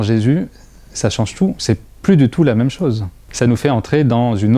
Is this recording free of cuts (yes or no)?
yes